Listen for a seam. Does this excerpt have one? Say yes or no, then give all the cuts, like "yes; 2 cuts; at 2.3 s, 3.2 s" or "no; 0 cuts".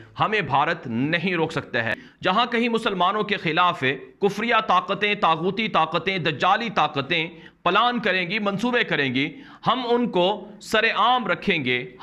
yes; 1 cut; at 2.1 s